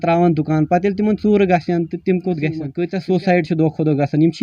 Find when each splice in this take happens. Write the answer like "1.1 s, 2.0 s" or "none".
2.8 s